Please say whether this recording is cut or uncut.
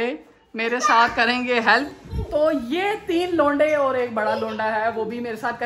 uncut